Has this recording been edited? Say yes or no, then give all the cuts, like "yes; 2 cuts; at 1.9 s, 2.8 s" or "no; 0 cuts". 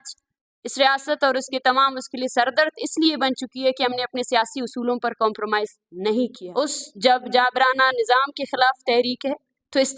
yes; 1 cut; at 6.4 s